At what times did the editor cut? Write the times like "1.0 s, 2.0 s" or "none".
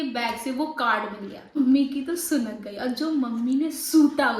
1.6 s